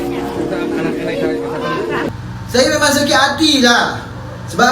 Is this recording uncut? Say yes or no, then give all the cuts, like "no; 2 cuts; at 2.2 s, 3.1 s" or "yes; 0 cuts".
no; 1 cut; at 2.0 s